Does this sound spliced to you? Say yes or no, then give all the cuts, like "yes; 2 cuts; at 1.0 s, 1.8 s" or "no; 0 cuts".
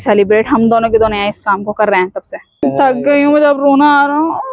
yes; 1 cut; at 2.6 s